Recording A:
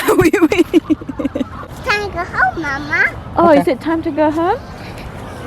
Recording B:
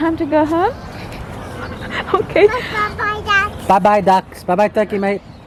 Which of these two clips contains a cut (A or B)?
A